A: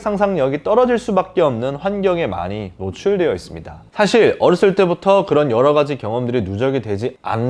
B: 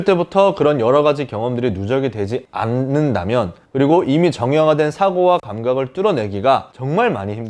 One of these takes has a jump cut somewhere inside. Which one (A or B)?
A